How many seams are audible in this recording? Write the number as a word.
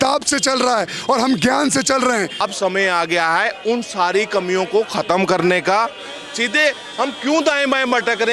one